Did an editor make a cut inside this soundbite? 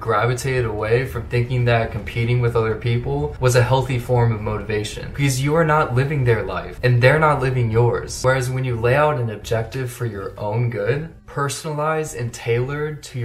yes; 4 cuts; at 3.3 s, 4.7 s, 6.6 s, 8.1 s

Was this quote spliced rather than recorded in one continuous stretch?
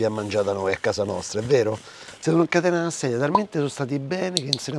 no; 0 cuts

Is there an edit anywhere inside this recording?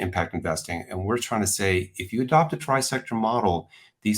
no; 0 cuts

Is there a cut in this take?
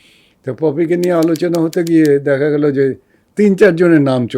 no; 0 cuts

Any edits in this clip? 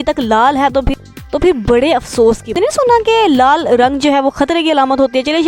yes; 1 cut; at 2.5 s

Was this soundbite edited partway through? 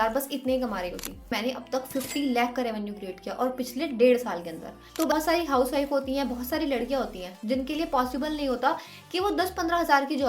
yes; 2 cuts; at 1.3 s, 5.1 s

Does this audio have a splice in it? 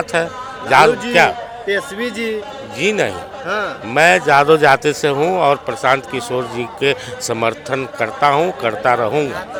no; 0 cuts

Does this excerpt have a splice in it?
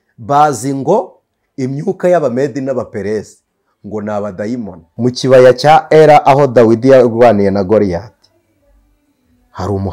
yes; 1 cut; at 4.8 s

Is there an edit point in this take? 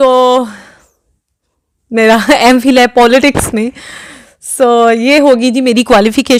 no; 0 cuts

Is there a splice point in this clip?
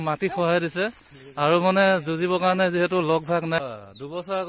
yes; 1 cut; at 3.5 s

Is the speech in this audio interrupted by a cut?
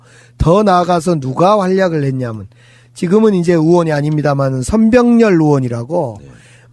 no; 0 cuts

